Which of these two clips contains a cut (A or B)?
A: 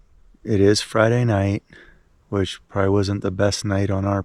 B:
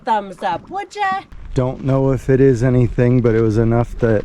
B